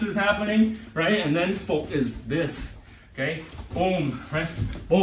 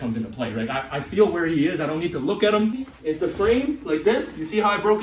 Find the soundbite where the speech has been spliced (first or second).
second